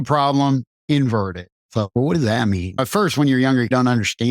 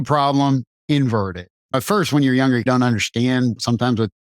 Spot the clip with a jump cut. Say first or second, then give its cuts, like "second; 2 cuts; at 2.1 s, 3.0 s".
second; 1 cut; at 1.6 s